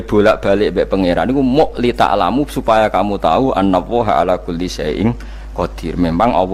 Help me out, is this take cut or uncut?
uncut